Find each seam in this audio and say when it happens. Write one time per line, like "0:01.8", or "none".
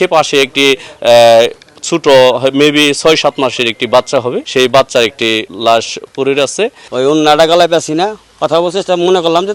0:06.7
0:08.2